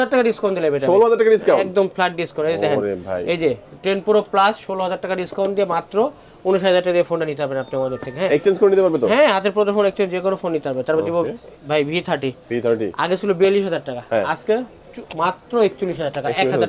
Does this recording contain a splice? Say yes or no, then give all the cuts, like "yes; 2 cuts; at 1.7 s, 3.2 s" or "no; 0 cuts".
no; 0 cuts